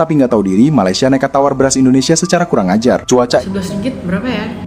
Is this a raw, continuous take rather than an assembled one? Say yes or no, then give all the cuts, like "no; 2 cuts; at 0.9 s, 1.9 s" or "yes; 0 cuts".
no; 1 cut; at 3.4 s